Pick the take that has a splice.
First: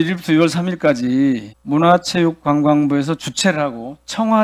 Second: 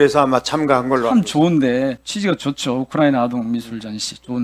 first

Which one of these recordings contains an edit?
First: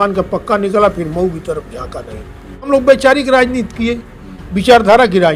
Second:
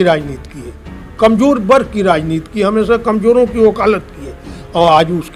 first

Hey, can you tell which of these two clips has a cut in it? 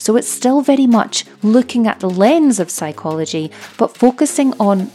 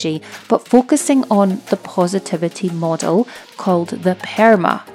second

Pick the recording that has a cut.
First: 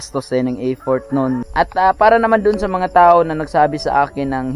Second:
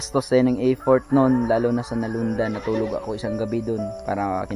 first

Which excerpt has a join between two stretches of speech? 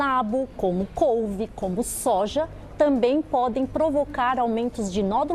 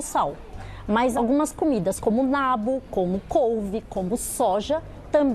second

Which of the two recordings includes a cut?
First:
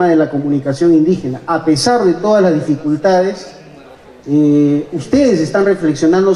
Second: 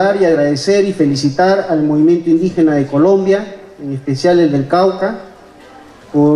second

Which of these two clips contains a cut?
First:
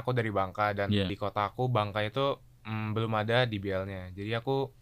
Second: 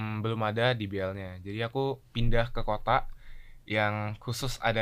first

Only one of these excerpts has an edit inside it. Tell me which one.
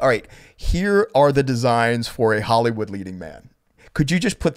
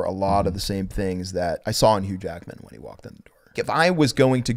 second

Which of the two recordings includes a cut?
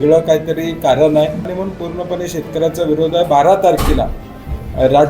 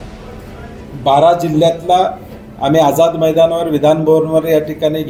first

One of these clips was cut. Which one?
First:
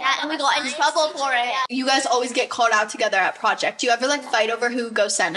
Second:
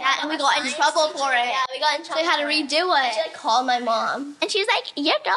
first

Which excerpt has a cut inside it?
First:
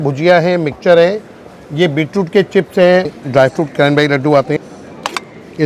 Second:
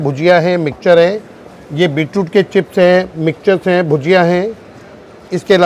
first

